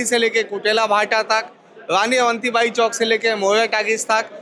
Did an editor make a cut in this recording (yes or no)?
no